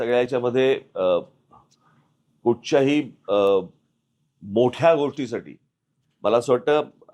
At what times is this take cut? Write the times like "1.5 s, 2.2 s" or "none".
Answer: 3.5 s